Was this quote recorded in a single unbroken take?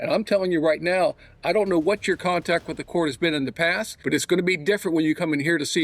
no; 1 cut; at 3.9 s

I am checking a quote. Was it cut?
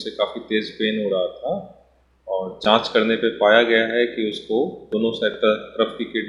no; 0 cuts

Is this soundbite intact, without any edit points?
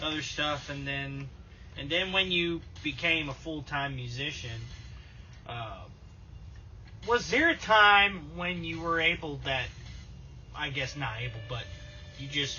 yes; 0 cuts

